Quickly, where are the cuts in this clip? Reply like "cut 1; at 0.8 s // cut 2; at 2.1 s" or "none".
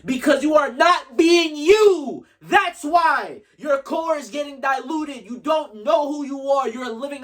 none